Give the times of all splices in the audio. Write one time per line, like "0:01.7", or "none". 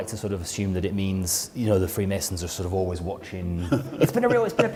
none